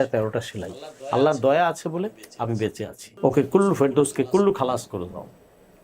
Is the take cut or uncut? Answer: cut